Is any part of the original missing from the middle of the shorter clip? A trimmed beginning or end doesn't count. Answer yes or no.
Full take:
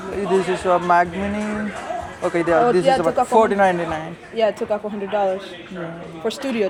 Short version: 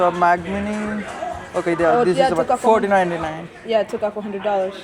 no